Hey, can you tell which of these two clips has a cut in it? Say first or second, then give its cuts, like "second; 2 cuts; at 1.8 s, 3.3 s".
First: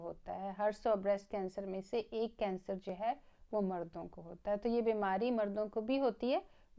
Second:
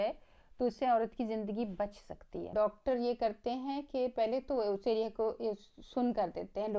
second; 1 cut; at 2.5 s